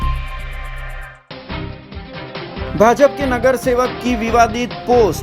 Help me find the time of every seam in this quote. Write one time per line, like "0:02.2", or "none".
0:01.1
0:02.0

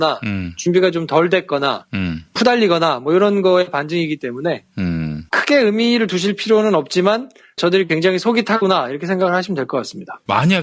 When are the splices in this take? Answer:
none

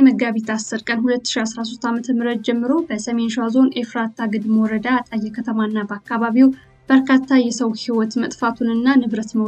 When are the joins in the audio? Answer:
0:06.7

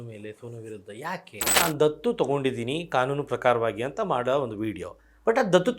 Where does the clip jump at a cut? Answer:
0:01.5

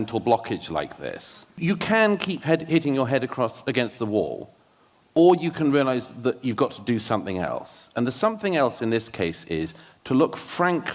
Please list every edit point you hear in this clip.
0:01.6

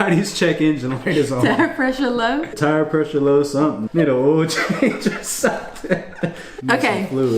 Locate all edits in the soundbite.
0:02.6
0:03.8
0:06.5

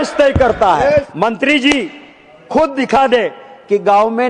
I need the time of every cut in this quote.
0:01.1

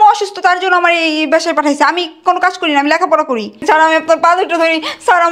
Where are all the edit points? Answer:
0:03.5

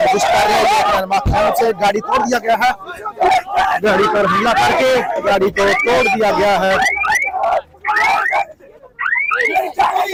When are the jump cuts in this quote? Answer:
none

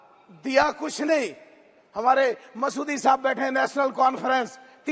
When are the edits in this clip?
none

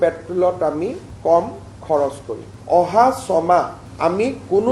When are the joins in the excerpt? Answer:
0:02.5

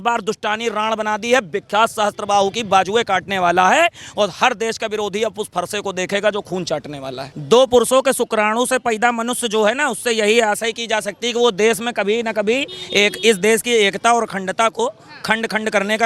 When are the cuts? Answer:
0:07.2

